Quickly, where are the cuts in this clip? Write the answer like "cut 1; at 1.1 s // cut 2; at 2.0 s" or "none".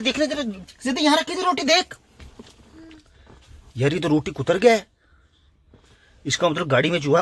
none